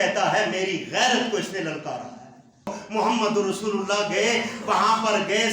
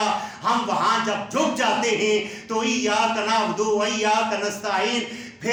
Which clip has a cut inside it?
first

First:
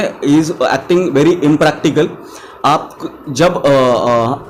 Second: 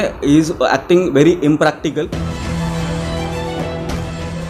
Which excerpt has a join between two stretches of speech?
second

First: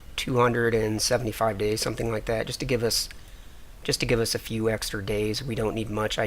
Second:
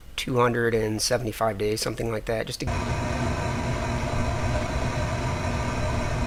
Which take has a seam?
first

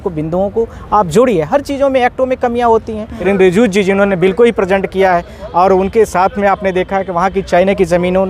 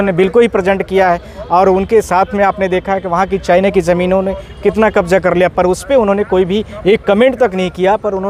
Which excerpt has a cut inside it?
first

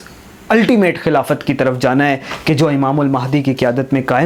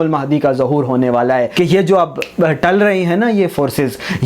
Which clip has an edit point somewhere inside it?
second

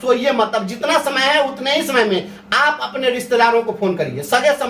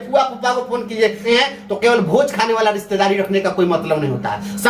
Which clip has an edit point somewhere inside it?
second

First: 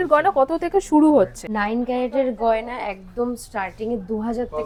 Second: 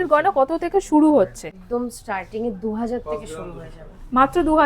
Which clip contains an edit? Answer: second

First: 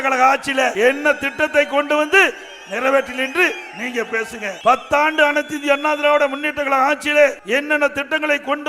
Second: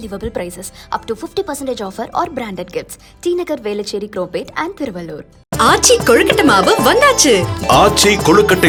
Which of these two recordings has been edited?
first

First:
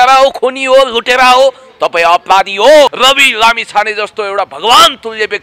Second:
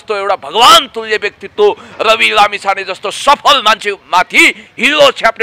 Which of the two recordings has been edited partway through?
first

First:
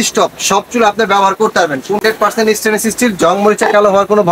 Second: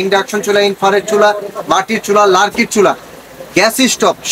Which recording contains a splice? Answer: first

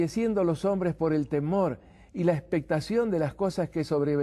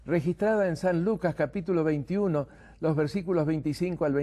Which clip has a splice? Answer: second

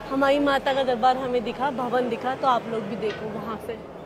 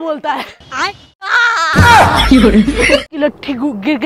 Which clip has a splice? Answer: second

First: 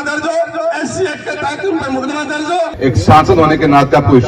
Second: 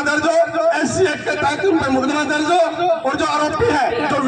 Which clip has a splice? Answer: first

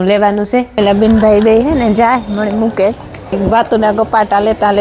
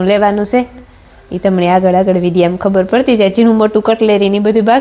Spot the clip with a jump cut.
first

